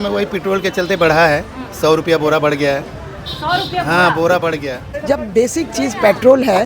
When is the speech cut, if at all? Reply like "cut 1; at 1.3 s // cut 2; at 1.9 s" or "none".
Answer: cut 1; at 4.9 s